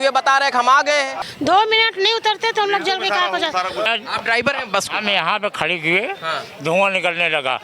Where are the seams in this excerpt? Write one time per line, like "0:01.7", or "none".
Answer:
0:01.2
0:03.9